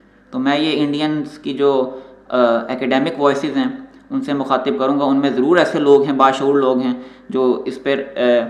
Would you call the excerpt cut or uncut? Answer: uncut